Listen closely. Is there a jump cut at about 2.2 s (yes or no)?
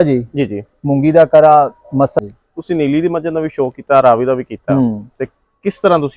yes